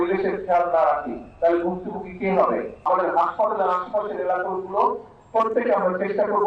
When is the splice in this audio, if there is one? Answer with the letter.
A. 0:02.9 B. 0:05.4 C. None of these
A